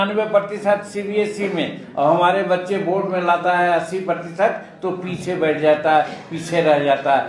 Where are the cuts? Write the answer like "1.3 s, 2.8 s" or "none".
none